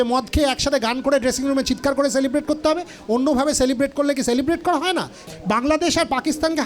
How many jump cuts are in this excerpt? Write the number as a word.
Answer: one